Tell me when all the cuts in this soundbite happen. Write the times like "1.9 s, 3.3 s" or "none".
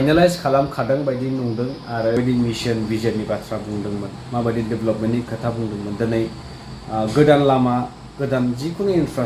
2.2 s